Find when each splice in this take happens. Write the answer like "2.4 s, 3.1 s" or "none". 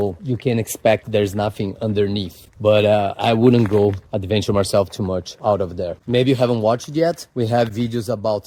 none